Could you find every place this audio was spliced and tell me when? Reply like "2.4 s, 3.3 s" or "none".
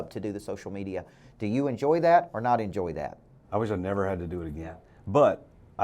4.8 s

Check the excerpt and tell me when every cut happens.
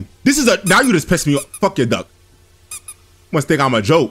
none

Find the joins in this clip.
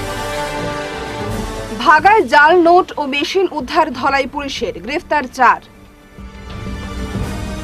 1.0 s

